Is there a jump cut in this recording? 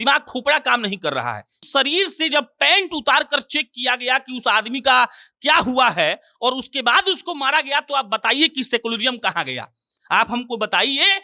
yes; 1 cut; at 1.6 s

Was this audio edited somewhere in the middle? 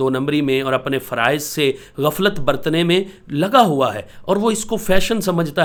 no; 0 cuts

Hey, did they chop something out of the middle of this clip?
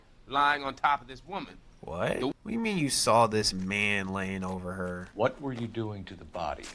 yes; 2 cuts; at 2.3 s, 5.1 s

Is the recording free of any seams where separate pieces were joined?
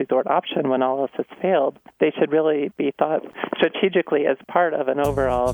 no; 2 cuts; at 1.8 s, 3.3 s

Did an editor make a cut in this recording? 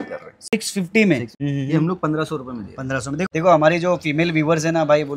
yes; 2 cuts; at 1.4 s, 3.2 s

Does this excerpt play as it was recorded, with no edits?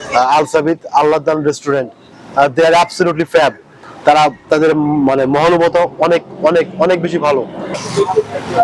no; 1 cut; at 7.6 s

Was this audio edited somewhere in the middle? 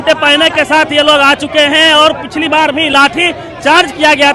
no; 0 cuts

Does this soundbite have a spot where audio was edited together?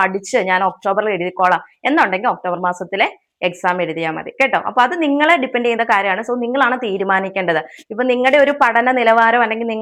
no; 0 cuts

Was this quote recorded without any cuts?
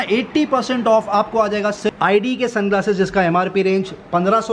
no; 1 cut; at 1.9 s

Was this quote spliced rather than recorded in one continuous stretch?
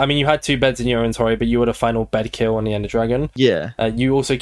no; 0 cuts

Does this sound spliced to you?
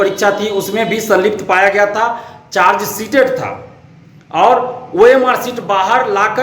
no; 0 cuts

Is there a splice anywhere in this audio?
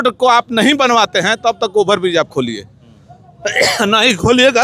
no; 0 cuts

